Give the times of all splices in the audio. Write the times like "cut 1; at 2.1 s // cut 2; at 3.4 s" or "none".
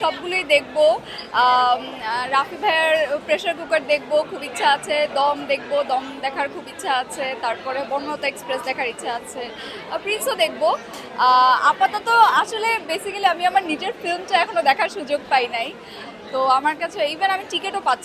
none